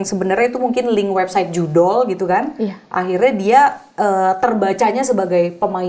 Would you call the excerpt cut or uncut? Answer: uncut